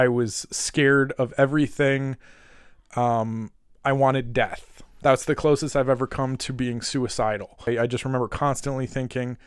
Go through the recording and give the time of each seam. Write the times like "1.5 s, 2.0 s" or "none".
7.7 s